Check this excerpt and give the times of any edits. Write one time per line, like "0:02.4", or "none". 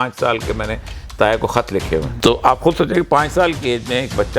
0:02.1